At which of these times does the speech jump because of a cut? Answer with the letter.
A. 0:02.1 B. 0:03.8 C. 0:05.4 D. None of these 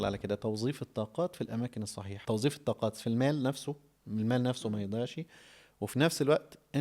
A